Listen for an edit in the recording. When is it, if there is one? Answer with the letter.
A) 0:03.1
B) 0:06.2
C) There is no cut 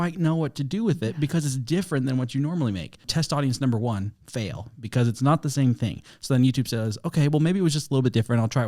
A